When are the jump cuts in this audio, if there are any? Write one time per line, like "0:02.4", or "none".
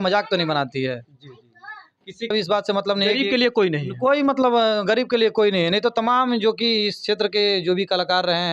0:02.3